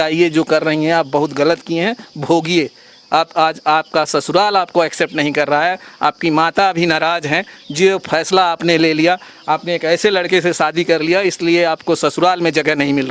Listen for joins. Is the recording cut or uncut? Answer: uncut